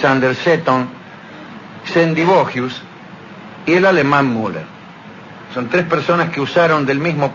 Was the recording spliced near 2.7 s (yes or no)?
yes